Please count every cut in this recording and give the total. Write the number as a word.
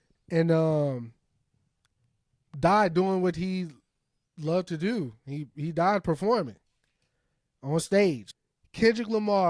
one